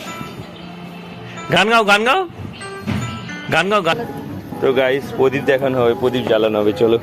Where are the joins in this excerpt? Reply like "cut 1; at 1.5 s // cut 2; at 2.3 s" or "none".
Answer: cut 1; at 4.0 s